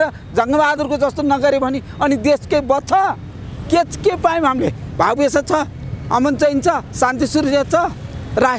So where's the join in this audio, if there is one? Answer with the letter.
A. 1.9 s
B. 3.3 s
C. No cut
C